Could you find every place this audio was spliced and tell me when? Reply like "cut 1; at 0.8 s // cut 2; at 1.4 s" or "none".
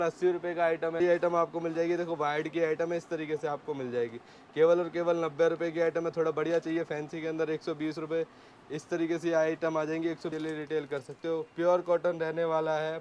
cut 1; at 1.0 s // cut 2; at 10.3 s